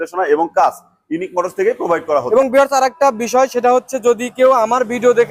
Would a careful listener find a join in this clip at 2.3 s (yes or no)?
yes